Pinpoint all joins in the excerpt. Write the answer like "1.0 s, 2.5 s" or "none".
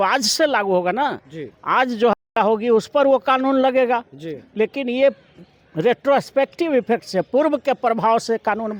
none